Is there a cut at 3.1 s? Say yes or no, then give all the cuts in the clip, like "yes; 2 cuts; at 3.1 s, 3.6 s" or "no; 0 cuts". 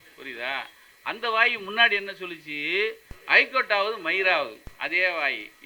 yes; 2 cuts; at 3.1 s, 4.6 s